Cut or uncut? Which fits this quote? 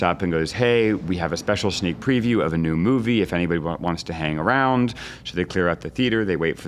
uncut